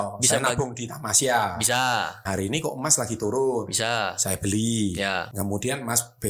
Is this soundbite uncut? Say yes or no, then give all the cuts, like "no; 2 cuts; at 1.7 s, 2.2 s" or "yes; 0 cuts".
no; 2 cuts; at 2.4 s, 5.3 s